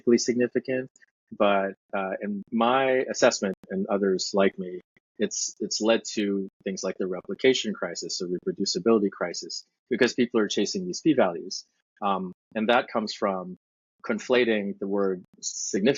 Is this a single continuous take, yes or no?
yes